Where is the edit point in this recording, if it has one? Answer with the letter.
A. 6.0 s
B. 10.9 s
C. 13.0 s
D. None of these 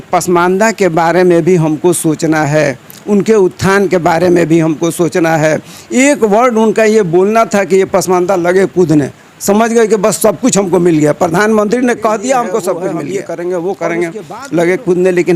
C